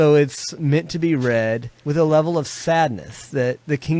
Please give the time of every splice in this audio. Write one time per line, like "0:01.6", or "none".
0:01.7

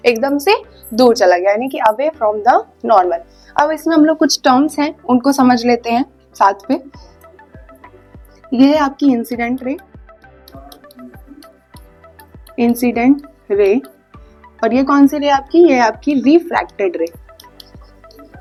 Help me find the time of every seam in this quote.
none

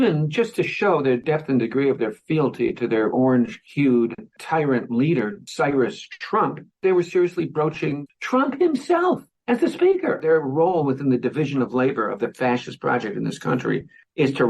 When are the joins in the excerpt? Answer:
0:03.6
0:08.0
0:10.2

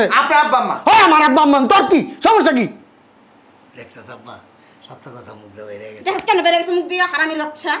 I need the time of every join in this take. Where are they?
none

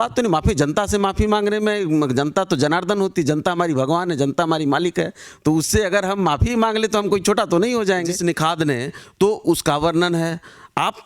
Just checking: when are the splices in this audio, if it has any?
0:08.1

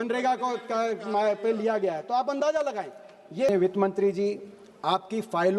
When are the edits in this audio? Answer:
0:03.5

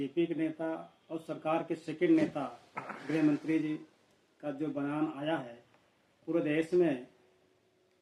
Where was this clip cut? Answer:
none

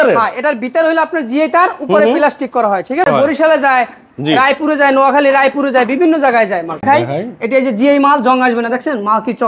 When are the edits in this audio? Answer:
0:03.1
0:06.8

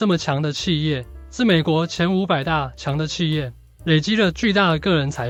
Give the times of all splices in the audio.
none

